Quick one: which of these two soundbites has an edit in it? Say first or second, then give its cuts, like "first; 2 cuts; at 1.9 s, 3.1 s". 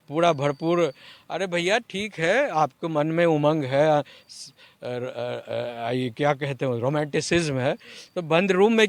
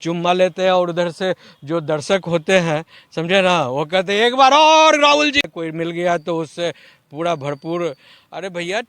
second; 1 cut; at 5.5 s